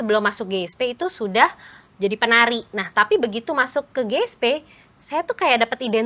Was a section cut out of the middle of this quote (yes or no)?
no